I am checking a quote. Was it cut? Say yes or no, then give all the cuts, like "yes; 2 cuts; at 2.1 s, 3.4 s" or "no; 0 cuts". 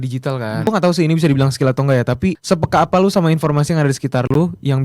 yes; 2 cuts; at 0.7 s, 2.4 s